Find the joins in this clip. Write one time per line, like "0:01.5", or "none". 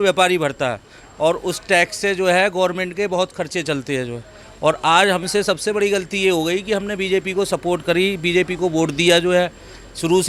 none